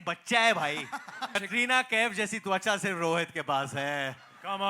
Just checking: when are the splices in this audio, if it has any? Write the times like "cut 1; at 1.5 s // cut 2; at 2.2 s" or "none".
cut 1; at 1.4 s